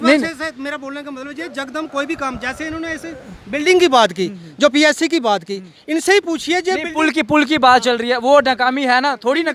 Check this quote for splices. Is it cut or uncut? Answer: uncut